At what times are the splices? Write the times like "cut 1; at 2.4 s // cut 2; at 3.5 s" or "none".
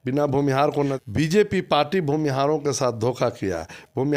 cut 1; at 0.9 s